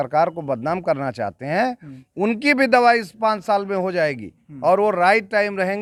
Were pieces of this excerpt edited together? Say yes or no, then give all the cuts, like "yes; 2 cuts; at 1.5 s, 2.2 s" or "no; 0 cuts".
no; 0 cuts